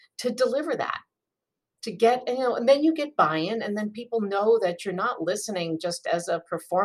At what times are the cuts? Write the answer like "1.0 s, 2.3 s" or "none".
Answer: none